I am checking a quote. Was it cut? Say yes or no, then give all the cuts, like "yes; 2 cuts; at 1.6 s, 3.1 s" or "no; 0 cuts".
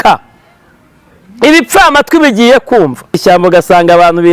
yes; 1 cut; at 3.2 s